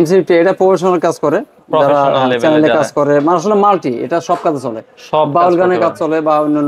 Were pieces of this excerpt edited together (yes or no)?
no